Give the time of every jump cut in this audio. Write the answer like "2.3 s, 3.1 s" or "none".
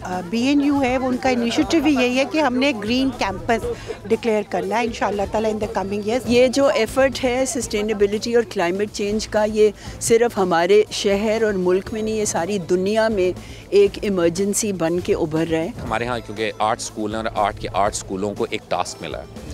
6.2 s, 15.8 s